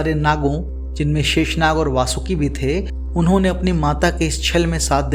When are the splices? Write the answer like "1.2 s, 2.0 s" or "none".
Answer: none